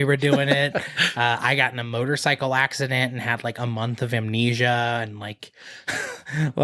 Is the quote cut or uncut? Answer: uncut